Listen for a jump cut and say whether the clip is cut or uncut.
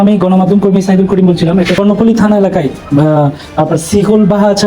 cut